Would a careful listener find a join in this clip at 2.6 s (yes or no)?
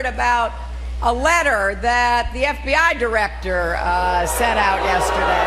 yes